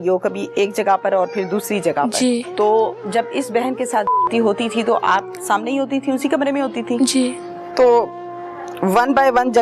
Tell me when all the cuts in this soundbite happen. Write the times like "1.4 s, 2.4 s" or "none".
2.5 s, 7.6 s